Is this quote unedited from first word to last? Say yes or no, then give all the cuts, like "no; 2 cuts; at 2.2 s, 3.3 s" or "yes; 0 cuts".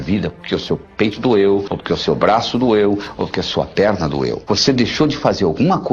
no; 2 cuts; at 1.7 s, 4.4 s